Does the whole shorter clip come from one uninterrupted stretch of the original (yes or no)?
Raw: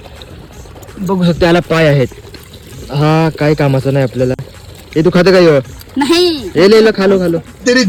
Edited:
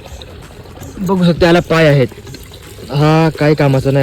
yes